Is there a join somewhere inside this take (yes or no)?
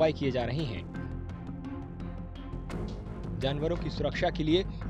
no